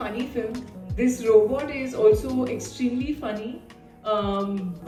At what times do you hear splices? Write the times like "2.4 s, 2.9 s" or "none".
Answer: none